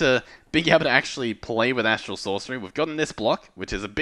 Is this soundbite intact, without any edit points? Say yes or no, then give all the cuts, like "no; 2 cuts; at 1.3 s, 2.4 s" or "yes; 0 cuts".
yes; 0 cuts